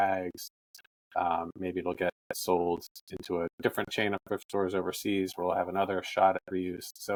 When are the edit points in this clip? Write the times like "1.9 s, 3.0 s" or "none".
none